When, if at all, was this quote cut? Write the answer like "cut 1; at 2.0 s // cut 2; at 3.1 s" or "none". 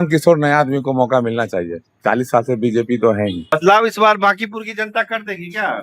cut 1; at 3.6 s